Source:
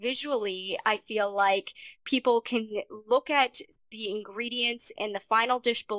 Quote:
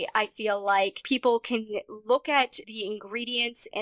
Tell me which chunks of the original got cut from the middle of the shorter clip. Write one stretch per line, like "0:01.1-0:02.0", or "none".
0:01.7-0:02.0
0:03.6-0:03.9